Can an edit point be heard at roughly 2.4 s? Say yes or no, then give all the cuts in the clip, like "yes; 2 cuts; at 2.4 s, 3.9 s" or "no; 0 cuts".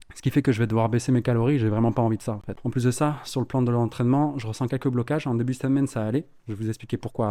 no; 0 cuts